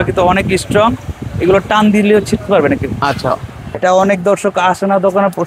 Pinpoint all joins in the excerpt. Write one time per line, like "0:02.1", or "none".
0:03.8